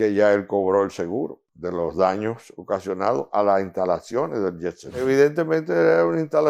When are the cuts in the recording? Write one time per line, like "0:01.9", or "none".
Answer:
0:01.5
0:05.0